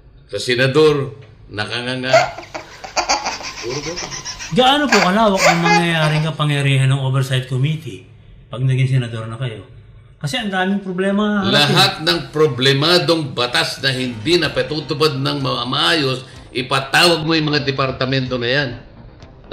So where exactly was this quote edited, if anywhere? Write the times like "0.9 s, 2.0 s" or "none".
none